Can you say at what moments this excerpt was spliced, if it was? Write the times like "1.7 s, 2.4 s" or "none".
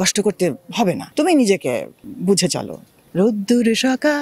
none